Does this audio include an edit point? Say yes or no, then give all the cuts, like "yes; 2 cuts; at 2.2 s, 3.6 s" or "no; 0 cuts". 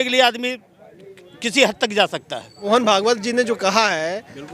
yes; 1 cut; at 2.5 s